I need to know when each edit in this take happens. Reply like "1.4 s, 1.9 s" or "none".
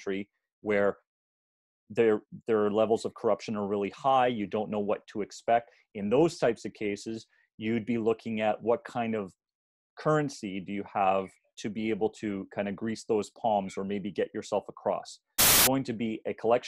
15.5 s